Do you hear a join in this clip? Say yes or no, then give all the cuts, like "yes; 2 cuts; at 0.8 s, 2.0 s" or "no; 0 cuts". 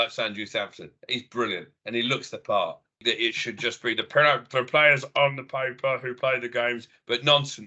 yes; 1 cut; at 3.0 s